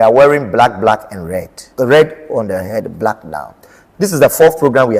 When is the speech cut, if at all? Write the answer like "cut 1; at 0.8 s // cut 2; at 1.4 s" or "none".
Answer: cut 1; at 1.6 s // cut 2; at 3.8 s